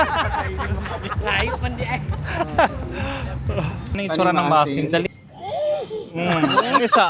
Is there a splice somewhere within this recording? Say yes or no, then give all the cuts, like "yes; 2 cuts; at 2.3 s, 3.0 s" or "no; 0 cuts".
yes; 2 cuts; at 4.0 s, 5.0 s